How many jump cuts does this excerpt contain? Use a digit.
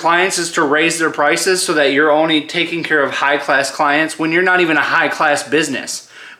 0